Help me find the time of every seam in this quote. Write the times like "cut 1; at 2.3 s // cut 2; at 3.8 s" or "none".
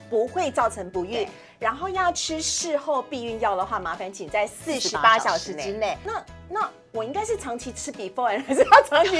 cut 1; at 6.0 s